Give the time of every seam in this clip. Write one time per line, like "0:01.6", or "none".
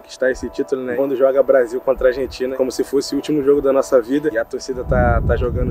0:01.0
0:02.5
0:04.3